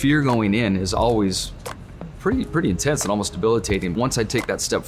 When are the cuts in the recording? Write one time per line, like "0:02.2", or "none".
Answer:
0:03.9